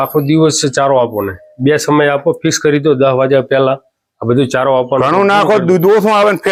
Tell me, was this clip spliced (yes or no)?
no